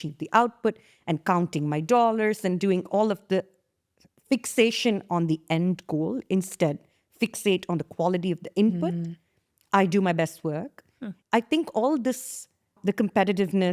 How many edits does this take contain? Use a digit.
2